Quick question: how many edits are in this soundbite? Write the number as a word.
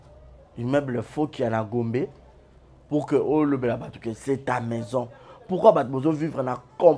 zero